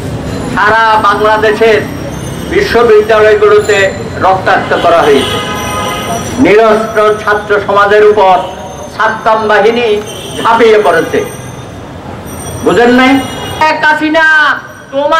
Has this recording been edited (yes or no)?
yes